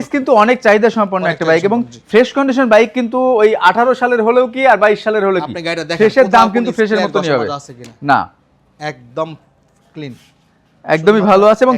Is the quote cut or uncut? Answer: uncut